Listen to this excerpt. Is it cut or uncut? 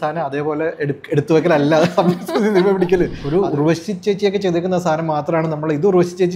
cut